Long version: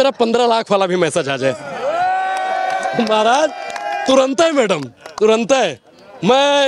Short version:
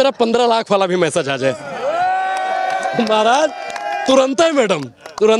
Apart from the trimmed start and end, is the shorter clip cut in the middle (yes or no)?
no